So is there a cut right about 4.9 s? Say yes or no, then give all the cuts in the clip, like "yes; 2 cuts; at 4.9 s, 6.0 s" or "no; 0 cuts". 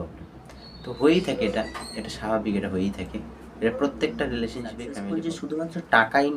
yes; 1 cut; at 4.9 s